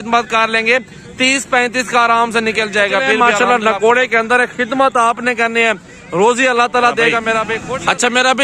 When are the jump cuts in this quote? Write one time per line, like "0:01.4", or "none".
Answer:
0:03.1
0:07.6